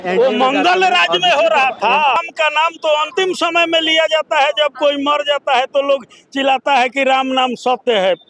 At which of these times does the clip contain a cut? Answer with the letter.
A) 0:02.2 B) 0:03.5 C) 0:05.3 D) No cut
A